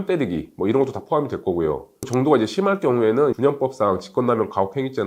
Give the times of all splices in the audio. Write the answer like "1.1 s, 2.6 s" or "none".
2.0 s